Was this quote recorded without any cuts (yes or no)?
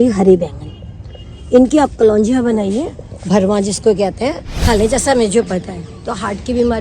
no